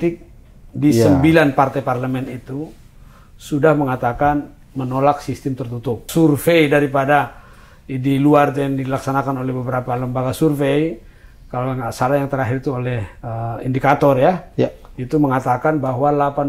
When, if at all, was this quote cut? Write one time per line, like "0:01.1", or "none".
0:06.1